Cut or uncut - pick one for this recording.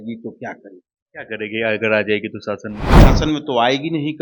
cut